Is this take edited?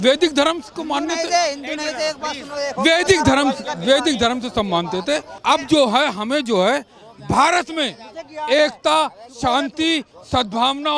yes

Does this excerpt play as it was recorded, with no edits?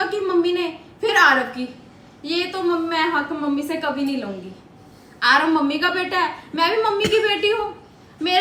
yes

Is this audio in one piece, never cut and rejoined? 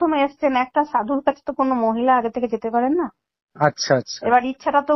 yes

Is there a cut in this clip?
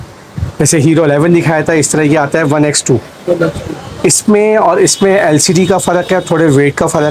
no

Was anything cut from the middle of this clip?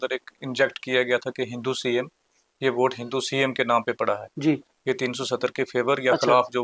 no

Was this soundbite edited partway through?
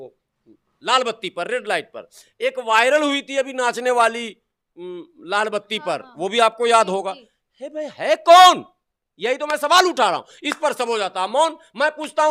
no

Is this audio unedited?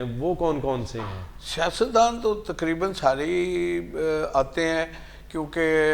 yes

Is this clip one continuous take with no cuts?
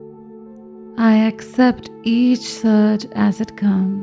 no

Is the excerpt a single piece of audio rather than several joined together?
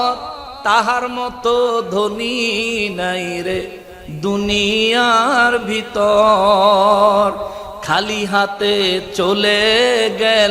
yes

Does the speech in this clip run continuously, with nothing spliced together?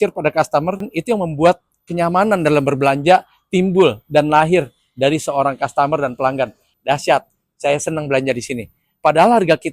no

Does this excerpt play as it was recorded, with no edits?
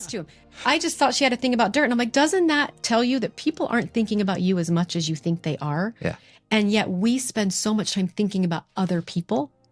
yes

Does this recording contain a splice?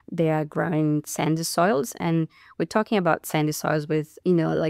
no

